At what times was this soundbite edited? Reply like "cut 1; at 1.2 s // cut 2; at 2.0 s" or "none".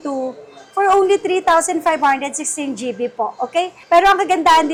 none